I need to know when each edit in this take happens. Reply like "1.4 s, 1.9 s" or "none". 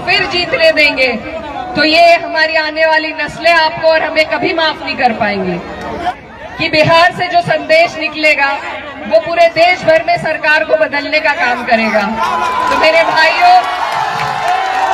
6.2 s

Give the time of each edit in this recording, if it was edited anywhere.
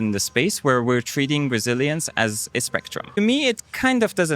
3.2 s

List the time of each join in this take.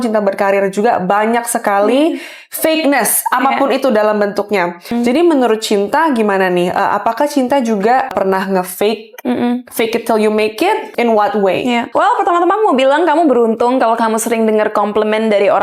4.9 s, 8.1 s, 11.9 s

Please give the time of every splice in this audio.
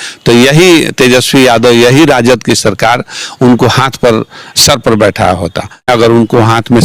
5.9 s

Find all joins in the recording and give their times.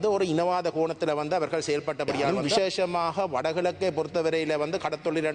2.4 s

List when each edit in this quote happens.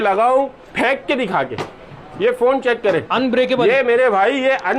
none

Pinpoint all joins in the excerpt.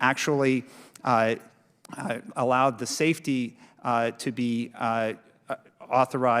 none

